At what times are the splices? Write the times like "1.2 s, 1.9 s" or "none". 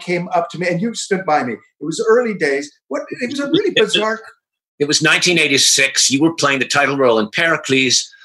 none